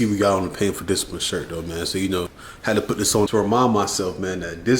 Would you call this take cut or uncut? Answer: cut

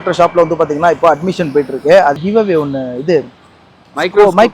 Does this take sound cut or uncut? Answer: cut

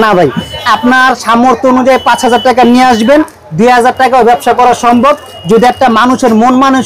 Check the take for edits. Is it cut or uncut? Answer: uncut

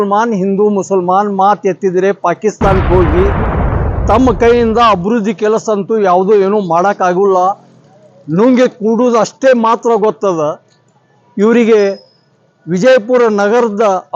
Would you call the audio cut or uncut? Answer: uncut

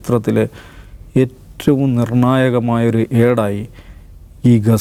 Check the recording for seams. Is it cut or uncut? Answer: uncut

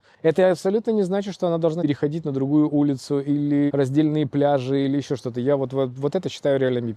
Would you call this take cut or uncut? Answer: cut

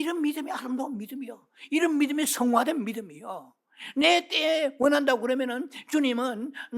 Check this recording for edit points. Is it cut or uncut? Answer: uncut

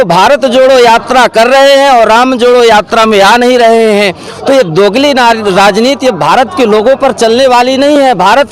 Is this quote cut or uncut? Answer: uncut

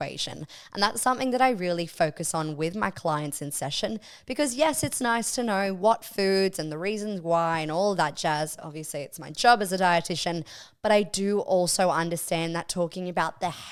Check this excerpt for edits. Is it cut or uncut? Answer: uncut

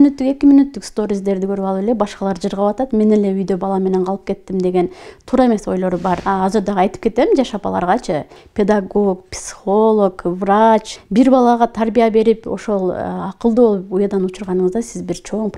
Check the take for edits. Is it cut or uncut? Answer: cut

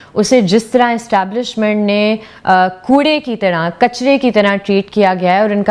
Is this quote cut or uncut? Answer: uncut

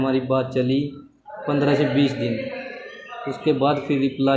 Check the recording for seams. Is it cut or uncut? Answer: uncut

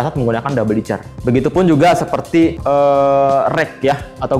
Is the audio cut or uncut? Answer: uncut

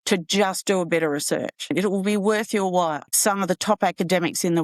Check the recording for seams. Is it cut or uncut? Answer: cut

